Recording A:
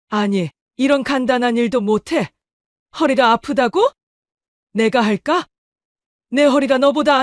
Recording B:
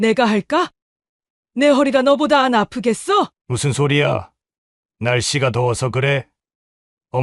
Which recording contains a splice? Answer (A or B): B